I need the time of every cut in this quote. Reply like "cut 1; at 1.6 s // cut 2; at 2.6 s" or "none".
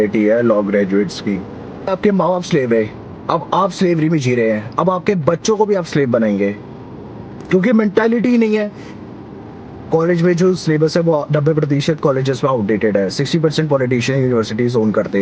cut 1; at 1.9 s // cut 2; at 9.1 s